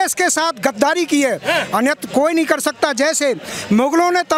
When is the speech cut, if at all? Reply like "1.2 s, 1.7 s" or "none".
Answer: none